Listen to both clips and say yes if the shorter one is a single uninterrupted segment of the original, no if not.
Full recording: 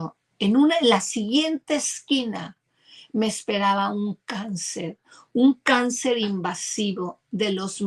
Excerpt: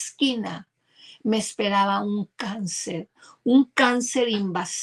yes